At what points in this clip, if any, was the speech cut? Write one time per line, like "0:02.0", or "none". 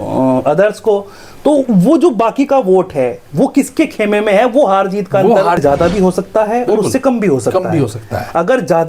0:05.6

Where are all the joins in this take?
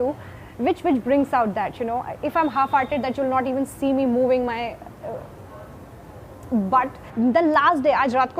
0:07.0

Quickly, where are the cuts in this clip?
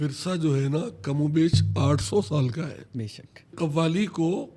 0:03.5

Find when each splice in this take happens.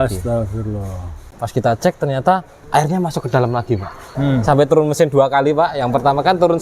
0:01.4
0:02.5
0:04.1

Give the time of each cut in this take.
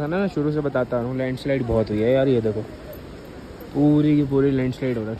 none

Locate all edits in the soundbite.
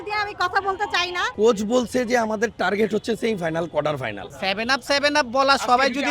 0:01.2
0:04.2

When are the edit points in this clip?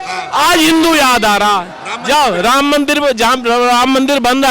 none

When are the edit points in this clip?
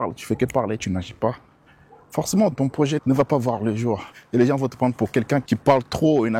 0:02.5
0:05.4

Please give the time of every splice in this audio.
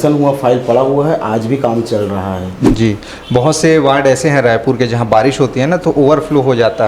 0:02.6

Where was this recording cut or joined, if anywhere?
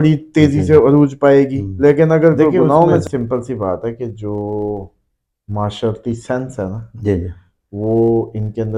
0:03.0

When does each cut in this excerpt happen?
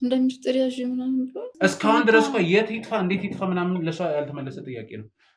0:01.5

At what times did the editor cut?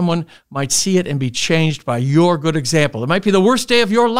none

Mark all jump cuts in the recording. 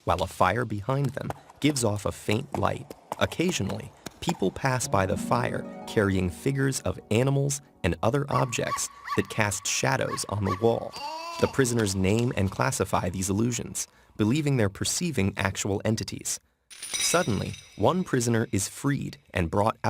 0:03.0

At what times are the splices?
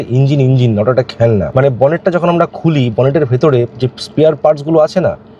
0:01.5

